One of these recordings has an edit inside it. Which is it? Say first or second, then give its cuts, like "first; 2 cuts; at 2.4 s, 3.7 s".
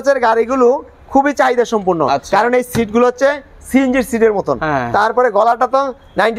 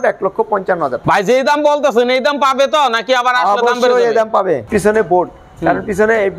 second; 2 cuts; at 1.0 s, 4.6 s